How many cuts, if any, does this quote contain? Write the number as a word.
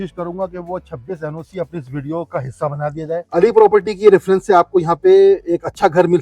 one